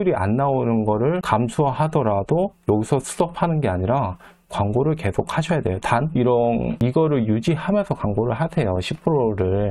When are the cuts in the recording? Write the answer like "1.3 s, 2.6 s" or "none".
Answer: none